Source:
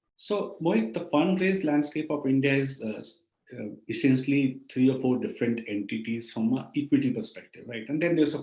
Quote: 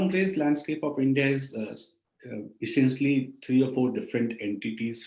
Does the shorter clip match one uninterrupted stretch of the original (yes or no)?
yes